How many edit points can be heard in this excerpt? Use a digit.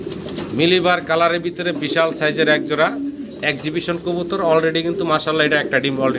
0